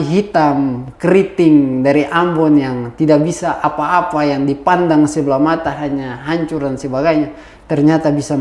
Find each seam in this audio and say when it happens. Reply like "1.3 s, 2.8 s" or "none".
none